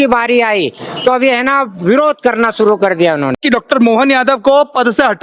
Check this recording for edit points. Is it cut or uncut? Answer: cut